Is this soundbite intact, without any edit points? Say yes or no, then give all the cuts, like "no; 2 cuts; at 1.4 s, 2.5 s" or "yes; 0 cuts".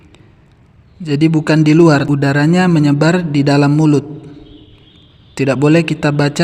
no; 1 cut; at 2.1 s